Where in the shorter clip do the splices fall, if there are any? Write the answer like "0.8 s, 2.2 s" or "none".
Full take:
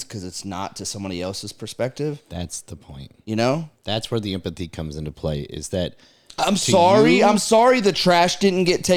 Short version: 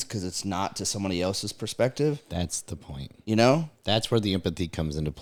none